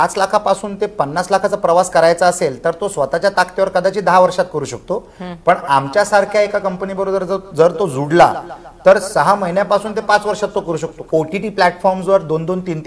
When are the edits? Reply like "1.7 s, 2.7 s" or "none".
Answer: 11.0 s